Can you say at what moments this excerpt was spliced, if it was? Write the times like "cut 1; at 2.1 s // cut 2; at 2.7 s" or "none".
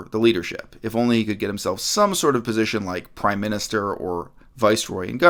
none

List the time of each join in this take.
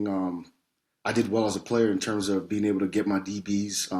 none

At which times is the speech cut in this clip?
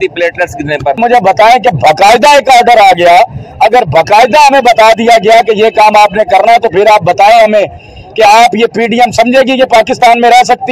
cut 1; at 1.0 s

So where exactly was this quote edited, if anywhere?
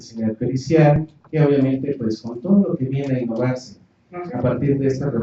cut 1; at 3.9 s

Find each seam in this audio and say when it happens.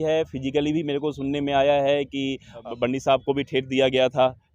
cut 1; at 2.7 s

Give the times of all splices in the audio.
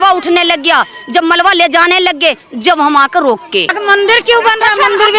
cut 1; at 3.7 s

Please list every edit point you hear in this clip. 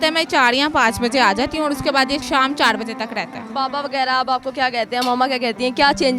cut 1; at 2.2 s // cut 2; at 3.5 s

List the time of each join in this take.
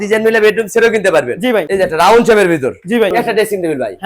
cut 1; at 1.7 s // cut 2; at 3.1 s

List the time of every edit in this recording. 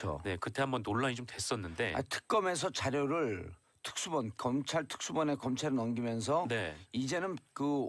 none

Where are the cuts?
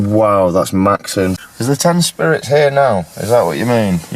cut 1; at 1.4 s

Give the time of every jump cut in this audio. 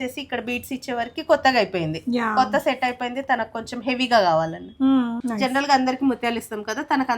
cut 1; at 5.1 s

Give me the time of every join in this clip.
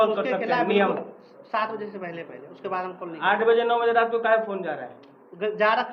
none

